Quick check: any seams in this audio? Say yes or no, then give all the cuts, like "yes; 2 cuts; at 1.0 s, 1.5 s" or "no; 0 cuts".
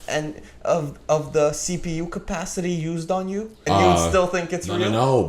yes; 1 cut; at 3.6 s